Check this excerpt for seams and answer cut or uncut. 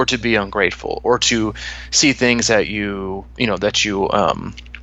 uncut